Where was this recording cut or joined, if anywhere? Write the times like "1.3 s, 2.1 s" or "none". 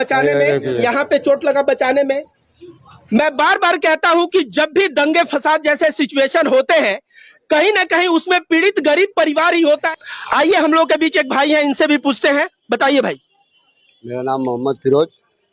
none